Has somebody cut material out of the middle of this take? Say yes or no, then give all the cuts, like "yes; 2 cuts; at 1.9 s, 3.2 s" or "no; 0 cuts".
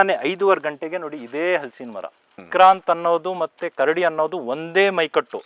yes; 1 cut; at 2.4 s